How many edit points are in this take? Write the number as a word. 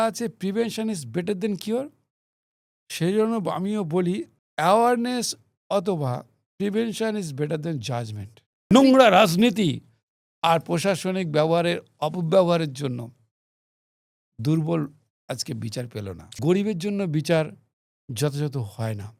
three